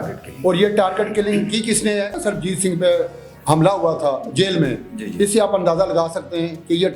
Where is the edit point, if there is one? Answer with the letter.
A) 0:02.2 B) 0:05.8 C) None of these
A